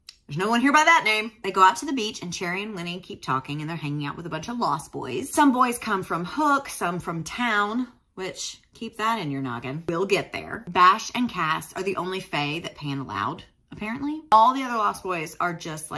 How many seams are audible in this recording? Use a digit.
0